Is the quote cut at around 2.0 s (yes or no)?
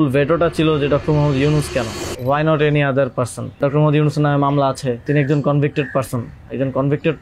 yes